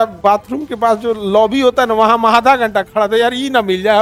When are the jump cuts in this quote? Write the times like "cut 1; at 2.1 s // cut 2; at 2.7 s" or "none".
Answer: none

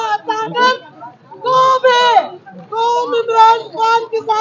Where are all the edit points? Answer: none

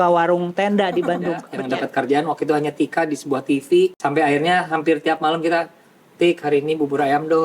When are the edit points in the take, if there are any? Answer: cut 1; at 1.5 s // cut 2; at 4.0 s

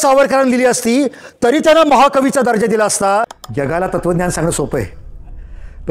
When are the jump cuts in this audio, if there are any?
cut 1; at 3.4 s

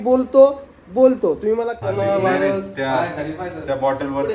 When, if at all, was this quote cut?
cut 1; at 1.8 s

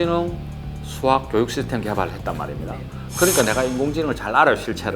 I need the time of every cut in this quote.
none

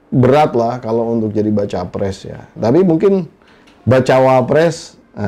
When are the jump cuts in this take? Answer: cut 1; at 2.5 s

